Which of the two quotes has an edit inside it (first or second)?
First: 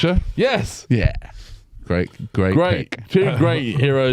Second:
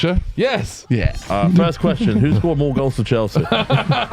second